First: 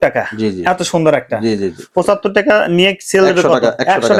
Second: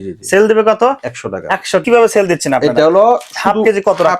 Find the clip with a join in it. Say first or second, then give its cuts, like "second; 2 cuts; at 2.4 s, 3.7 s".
second; 1 cut; at 1.8 s